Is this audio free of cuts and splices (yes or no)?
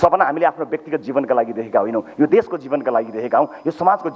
yes